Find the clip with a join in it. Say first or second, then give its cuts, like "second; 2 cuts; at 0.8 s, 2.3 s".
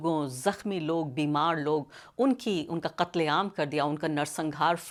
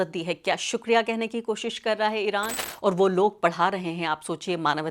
second; 1 cut; at 2.6 s